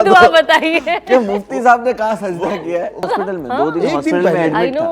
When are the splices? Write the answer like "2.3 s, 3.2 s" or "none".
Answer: 3.1 s